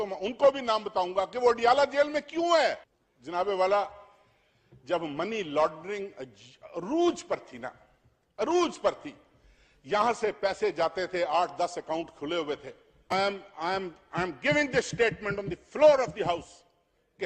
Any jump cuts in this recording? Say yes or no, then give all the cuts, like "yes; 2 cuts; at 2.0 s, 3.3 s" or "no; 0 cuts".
no; 0 cuts